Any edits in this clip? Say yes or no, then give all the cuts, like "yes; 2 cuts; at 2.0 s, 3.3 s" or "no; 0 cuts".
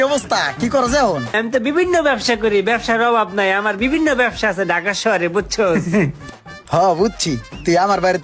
yes; 1 cut; at 1.4 s